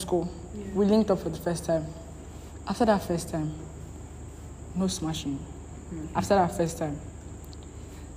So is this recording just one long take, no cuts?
yes; 0 cuts

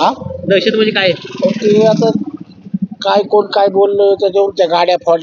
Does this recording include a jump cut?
no; 0 cuts

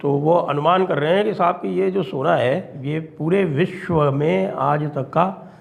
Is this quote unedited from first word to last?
no; 1 cut; at 2.8 s

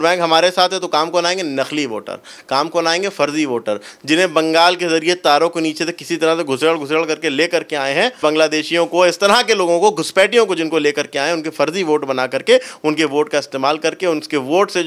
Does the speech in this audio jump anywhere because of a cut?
no; 0 cuts

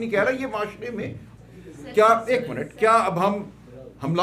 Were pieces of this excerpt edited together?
yes; 1 cut; at 1.3 s

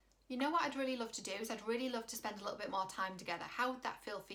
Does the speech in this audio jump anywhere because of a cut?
no; 0 cuts

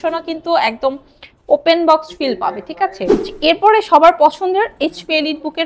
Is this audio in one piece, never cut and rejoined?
no; 1 cut; at 3.3 s

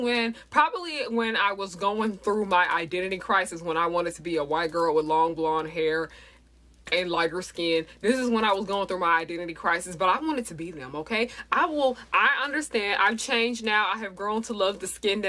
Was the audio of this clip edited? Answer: no; 0 cuts

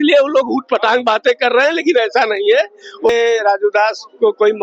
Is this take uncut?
no; 1 cut; at 3.1 s

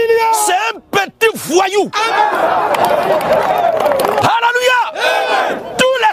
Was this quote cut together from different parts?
yes; 1 cut; at 4.2 s

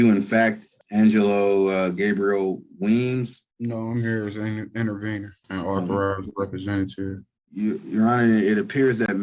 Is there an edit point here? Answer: no; 0 cuts

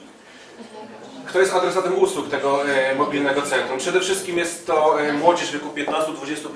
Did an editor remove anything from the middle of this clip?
no; 0 cuts

